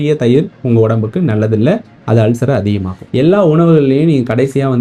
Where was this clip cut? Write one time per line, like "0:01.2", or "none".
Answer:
0:02.9